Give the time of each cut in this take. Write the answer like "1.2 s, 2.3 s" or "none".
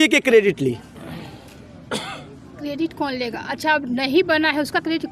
none